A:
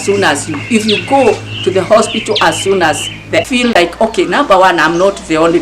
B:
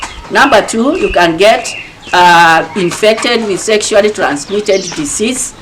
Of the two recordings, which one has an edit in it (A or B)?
A